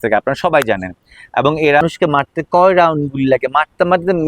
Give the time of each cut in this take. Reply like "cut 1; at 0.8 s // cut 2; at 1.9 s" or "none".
cut 1; at 1.8 s